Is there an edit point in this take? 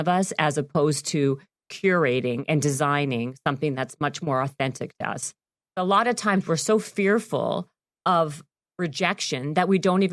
yes; 1 cut; at 5.8 s

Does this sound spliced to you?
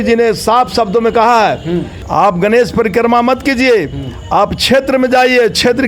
yes; 1 cut; at 1.9 s

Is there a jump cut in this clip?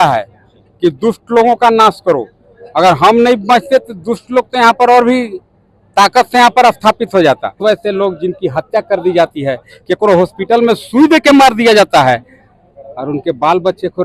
yes; 1 cut; at 7.6 s

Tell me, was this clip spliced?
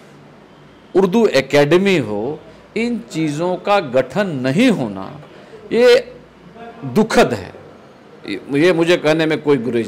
no; 0 cuts

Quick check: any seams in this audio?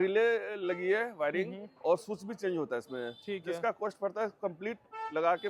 no; 0 cuts

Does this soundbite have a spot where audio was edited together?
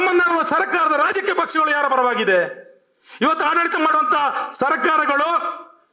no; 0 cuts

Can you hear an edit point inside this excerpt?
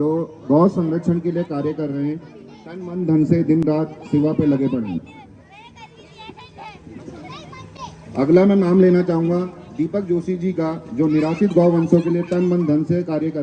no; 0 cuts

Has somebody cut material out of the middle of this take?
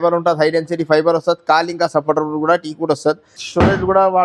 yes; 1 cut; at 3.3 s

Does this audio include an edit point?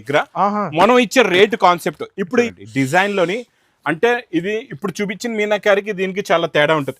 yes; 1 cut; at 2.5 s

